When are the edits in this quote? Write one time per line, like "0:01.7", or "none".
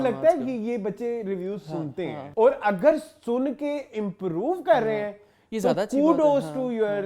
0:02.2